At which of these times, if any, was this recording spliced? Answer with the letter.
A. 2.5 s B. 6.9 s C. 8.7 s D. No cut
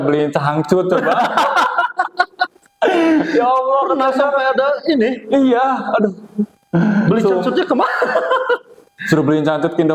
D